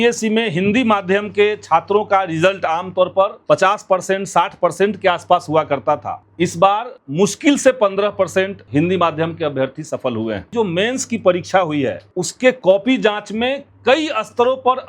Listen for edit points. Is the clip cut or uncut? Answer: cut